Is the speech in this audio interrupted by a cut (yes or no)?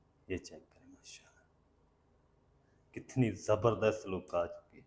no